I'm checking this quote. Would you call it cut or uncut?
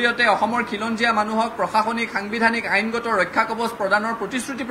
uncut